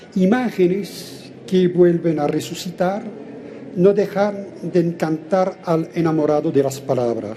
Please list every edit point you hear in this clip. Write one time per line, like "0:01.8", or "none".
none